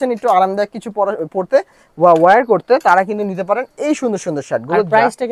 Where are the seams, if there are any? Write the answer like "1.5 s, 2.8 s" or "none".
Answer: none